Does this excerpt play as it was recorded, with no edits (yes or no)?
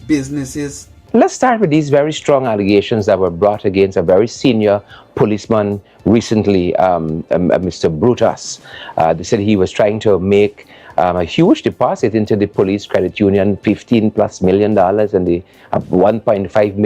no